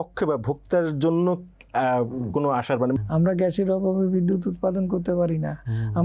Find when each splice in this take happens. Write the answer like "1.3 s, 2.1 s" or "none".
3.0 s